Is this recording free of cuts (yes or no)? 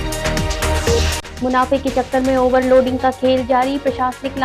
no